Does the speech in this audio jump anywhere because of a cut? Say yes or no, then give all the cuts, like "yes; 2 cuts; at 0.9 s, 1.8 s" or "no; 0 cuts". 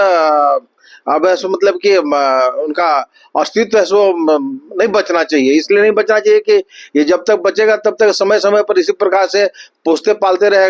no; 0 cuts